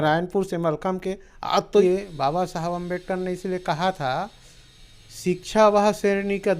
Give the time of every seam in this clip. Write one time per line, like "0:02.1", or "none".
0:01.8